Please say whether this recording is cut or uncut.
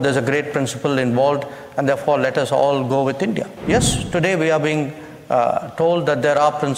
cut